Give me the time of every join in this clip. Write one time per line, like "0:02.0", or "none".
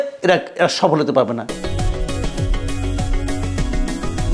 0:01.5